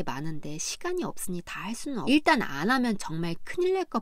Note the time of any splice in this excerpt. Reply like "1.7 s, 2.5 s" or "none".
2.0 s